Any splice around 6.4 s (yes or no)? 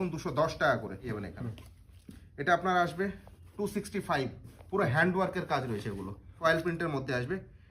yes